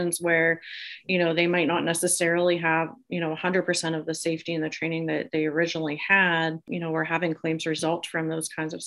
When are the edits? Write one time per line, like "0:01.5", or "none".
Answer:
0:06.7